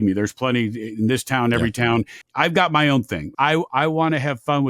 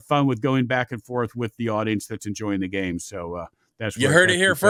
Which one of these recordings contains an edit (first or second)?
first